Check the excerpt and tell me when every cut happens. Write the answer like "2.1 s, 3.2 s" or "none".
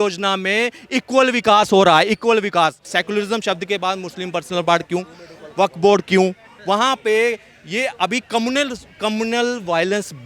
2.8 s